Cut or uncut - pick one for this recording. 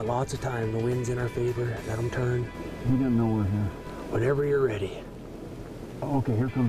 cut